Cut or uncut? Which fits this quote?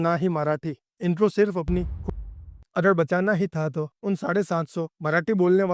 cut